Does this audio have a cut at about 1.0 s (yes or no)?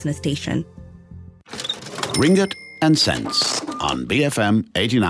yes